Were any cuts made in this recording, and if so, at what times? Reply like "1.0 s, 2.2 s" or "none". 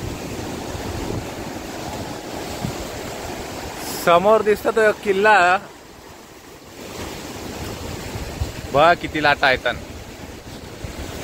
none